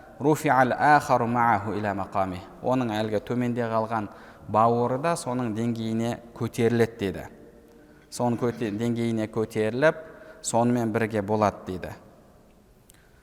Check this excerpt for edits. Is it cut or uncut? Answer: uncut